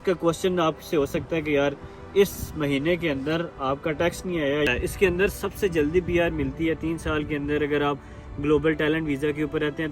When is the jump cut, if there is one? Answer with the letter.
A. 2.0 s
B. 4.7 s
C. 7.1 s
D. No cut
B